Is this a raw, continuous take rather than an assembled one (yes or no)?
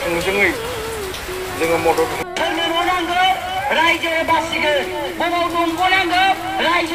no